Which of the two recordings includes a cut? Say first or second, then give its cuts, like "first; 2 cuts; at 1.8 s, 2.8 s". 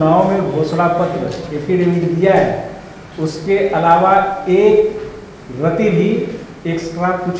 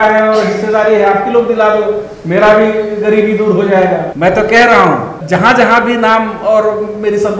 second; 2 cuts; at 4.1 s, 5.2 s